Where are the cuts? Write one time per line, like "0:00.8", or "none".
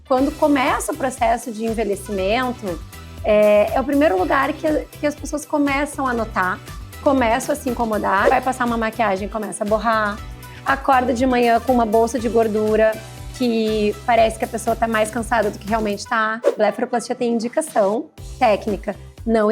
0:08.3
0:16.5